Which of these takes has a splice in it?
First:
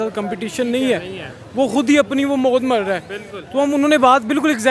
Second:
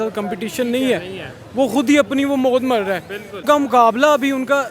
second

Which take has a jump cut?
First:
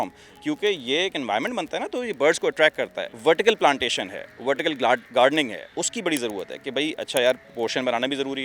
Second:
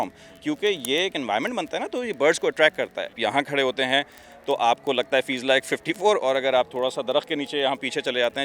second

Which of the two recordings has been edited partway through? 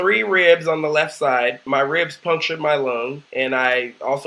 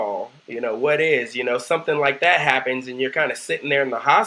first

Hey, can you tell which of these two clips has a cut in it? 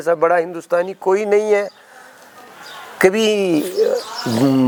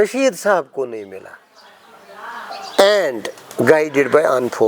second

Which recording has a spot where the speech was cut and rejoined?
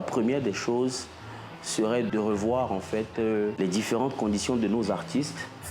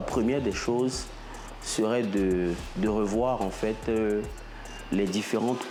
first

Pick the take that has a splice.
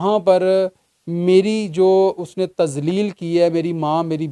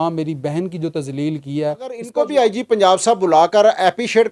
second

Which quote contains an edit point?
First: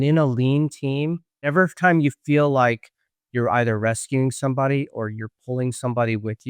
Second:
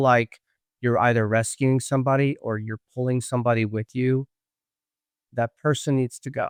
first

